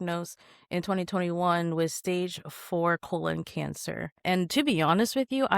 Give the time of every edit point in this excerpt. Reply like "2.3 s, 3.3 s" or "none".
4.2 s